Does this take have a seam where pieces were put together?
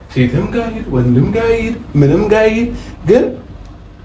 no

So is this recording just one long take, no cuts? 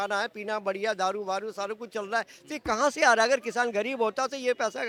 yes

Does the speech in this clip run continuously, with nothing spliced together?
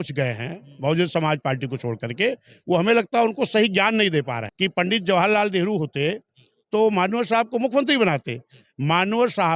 no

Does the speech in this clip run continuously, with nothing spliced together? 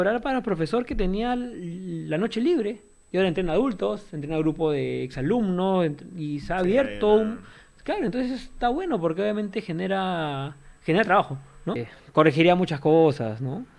no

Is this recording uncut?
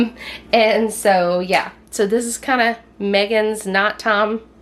yes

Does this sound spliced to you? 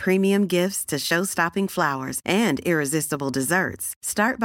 no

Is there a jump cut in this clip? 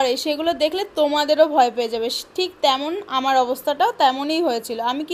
no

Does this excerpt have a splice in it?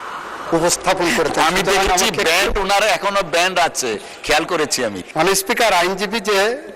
yes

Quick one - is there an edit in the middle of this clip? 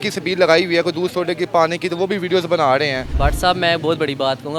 yes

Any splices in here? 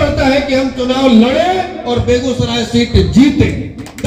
no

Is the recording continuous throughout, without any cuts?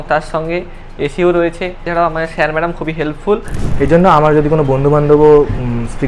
no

